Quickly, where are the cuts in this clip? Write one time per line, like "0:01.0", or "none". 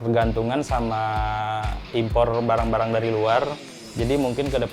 0:01.8